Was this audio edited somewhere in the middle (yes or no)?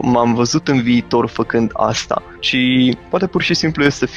yes